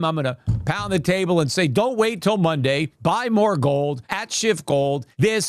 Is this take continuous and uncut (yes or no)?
no